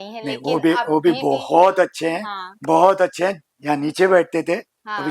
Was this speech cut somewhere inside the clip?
yes; 1 cut; at 3.5 s

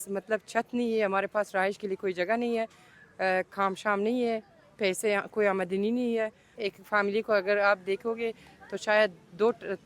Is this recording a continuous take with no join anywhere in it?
no; 1 cut; at 6.6 s

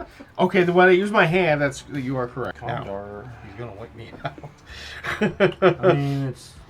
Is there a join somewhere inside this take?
yes; 1 cut; at 2.5 s

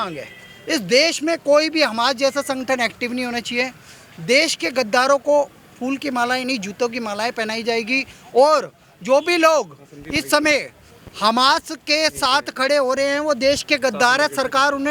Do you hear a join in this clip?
no; 0 cuts

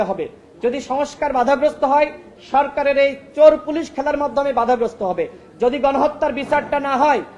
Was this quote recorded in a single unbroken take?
yes; 0 cuts

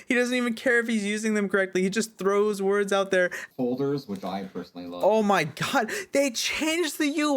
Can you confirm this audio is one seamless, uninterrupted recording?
no; 1 cut; at 3.4 s

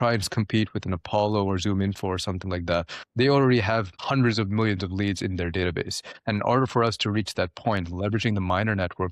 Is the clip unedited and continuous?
no; 1 cut; at 4.0 s

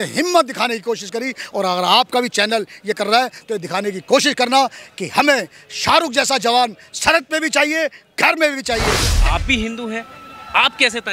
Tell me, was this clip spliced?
yes; 1 cut; at 9.1 s

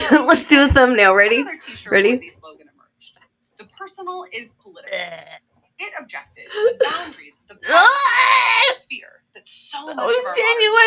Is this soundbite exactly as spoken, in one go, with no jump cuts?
yes; 0 cuts

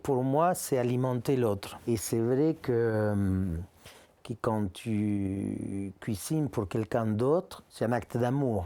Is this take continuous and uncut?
no; 2 cuts; at 1.8 s, 7.6 s

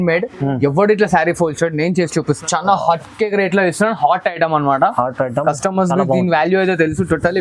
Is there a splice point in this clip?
yes; 1 cut; at 2.4 s

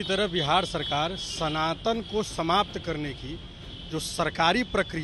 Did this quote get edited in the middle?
no; 0 cuts

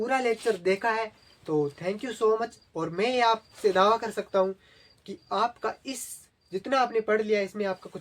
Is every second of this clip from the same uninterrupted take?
yes; 0 cuts

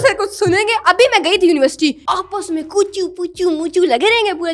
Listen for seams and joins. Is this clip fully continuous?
no; 1 cut; at 2.0 s

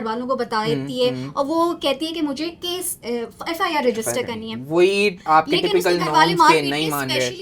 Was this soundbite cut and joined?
no; 0 cuts

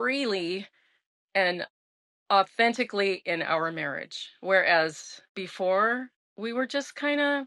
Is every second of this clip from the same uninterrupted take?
yes; 0 cuts

